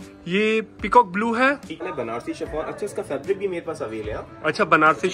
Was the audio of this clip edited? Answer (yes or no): yes